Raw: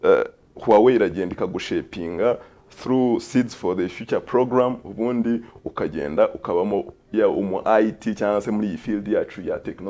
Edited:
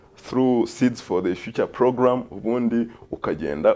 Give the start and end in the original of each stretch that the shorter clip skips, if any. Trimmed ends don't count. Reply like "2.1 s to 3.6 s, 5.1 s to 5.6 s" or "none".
none